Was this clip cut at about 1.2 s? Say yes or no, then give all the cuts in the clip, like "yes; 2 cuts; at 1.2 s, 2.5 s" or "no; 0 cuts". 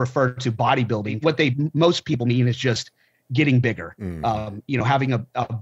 yes; 1 cut; at 1.2 s